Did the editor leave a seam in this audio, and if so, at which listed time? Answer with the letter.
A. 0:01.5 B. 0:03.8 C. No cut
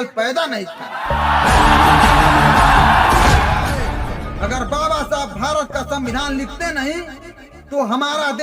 B